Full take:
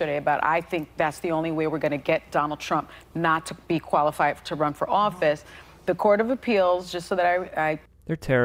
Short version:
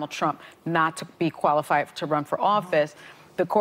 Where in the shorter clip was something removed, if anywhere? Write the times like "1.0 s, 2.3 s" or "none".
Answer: none